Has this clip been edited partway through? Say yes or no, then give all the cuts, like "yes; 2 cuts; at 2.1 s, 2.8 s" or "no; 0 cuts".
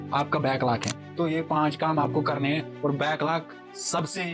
yes; 1 cut; at 1.0 s